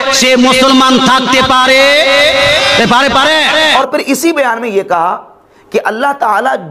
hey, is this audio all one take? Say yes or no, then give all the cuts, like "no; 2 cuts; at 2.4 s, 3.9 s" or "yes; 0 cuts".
no; 1 cut; at 3.7 s